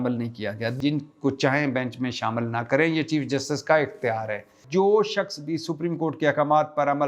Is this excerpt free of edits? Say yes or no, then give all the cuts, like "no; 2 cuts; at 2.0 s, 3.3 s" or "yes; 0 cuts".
no; 2 cuts; at 0.8 s, 4.6 s